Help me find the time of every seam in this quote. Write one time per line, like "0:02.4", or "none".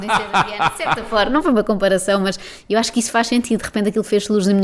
none